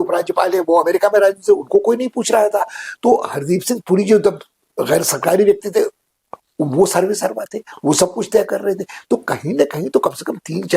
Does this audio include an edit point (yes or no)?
no